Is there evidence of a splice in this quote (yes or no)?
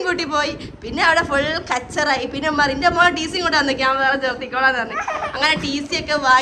no